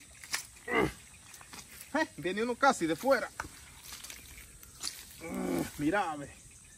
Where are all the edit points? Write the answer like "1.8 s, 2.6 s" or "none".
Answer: none

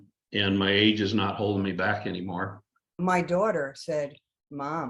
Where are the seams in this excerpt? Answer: 3.0 s

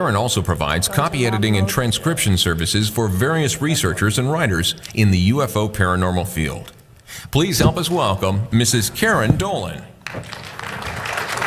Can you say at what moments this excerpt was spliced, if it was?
5.7 s

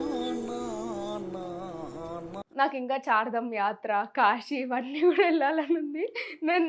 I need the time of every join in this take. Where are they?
2.4 s

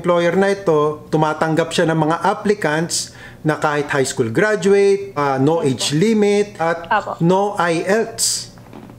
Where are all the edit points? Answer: 5.1 s, 6.5 s

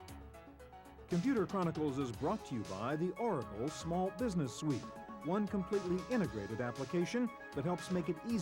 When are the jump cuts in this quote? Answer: 1.1 s

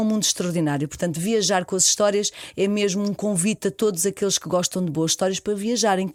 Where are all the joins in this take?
none

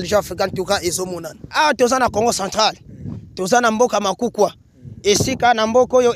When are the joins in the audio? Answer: 1.5 s

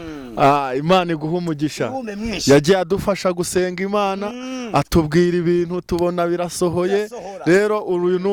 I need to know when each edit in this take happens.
none

